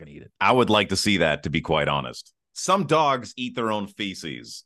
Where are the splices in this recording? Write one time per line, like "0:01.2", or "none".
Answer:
0:02.5

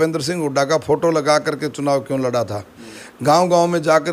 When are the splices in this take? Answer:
none

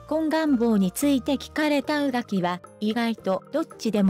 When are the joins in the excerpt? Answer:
0:02.5

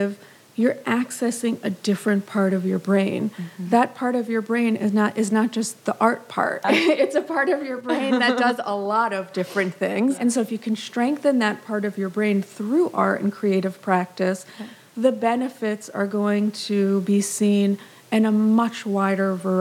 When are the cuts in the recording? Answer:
0:06.6
0:10.1

